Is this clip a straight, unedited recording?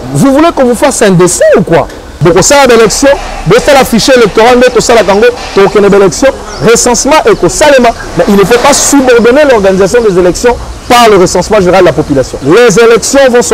no; 2 cuts; at 2.0 s, 12.3 s

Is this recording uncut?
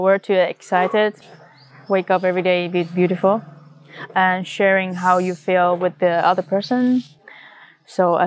no; 1 cut; at 7.1 s

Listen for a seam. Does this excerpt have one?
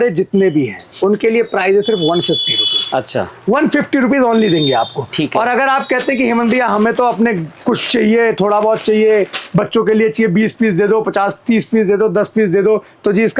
no; 0 cuts

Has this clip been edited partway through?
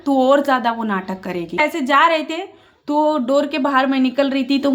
yes; 1 cut; at 1.6 s

